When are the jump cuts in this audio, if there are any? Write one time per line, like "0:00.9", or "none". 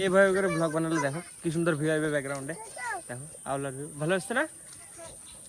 none

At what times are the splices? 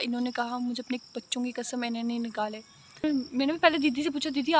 0:03.0

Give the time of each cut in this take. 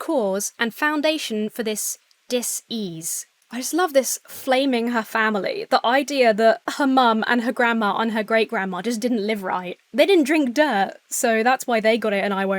0:03.4
0:06.7

